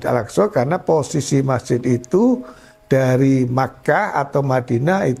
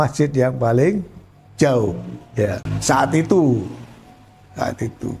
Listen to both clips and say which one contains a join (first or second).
second